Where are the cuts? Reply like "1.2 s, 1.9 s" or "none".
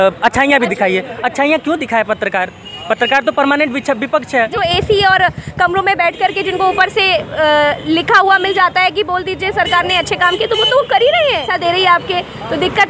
4.5 s, 11.5 s